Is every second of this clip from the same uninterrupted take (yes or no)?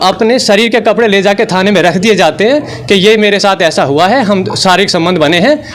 yes